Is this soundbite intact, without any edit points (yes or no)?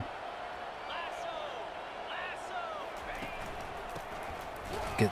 yes